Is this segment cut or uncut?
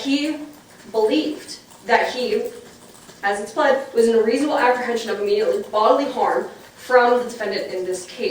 uncut